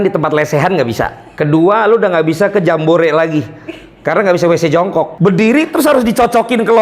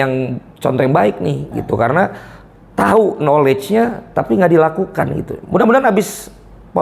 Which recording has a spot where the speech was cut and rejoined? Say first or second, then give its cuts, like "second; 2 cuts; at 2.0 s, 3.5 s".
first; 2 cuts; at 1.2 s, 5.1 s